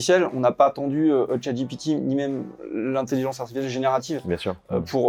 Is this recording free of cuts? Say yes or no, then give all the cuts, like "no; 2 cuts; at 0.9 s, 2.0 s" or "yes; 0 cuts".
yes; 0 cuts